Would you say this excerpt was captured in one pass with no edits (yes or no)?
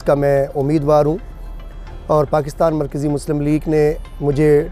yes